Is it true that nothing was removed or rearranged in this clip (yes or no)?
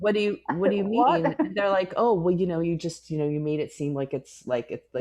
yes